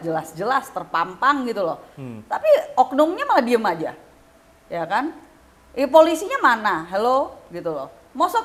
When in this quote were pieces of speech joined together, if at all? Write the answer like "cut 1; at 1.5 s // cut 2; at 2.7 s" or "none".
none